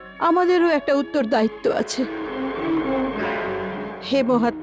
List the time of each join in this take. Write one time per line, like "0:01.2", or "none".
none

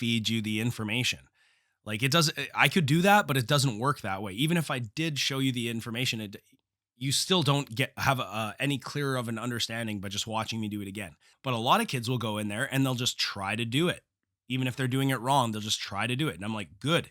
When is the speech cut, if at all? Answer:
0:11.3

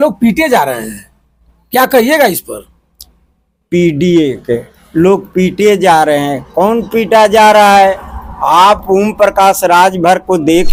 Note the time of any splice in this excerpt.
none

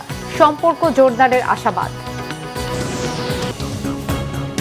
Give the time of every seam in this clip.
0:03.5

